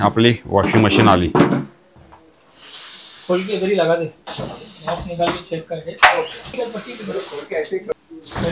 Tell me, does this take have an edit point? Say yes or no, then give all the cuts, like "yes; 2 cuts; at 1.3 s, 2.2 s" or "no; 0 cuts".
yes; 2 cuts; at 4.3 s, 6.5 s